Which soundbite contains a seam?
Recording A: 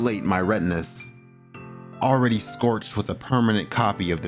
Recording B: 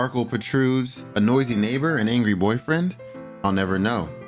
B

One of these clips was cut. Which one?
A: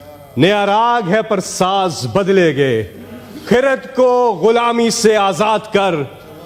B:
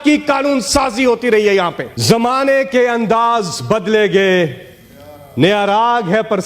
B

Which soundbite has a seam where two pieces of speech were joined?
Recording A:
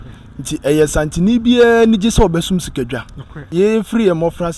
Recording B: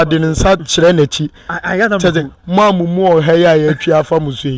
A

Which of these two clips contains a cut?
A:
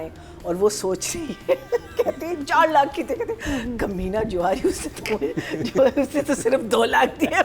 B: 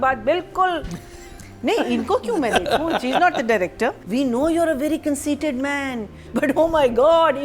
B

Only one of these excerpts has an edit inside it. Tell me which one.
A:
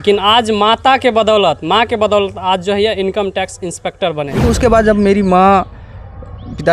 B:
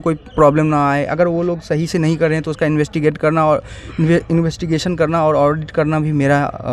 A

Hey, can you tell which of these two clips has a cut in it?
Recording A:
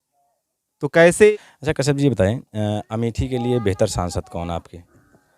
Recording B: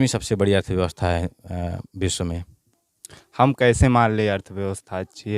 A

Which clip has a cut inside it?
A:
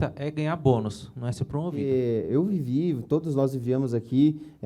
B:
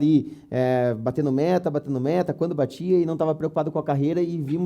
A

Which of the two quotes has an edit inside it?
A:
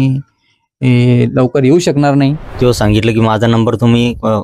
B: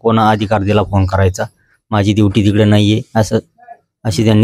A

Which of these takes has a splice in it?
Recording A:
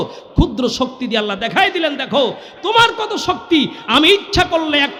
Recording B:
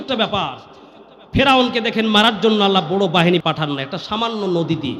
B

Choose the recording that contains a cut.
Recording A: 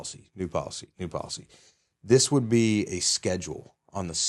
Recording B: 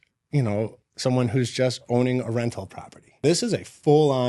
B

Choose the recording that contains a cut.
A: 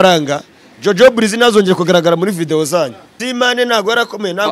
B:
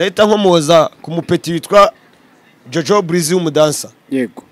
A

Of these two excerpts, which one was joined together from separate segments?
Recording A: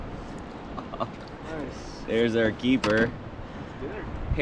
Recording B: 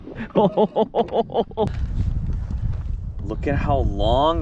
B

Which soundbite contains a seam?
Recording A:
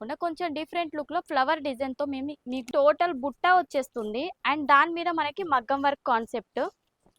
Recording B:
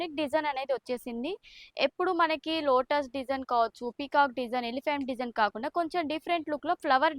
A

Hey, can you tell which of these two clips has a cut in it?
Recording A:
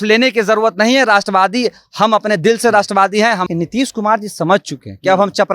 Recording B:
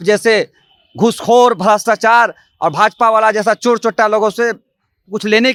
A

